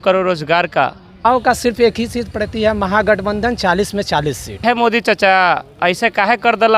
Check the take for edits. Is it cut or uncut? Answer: cut